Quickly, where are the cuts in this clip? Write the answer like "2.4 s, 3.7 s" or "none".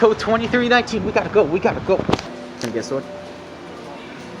2.3 s